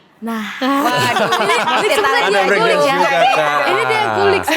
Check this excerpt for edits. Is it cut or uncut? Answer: uncut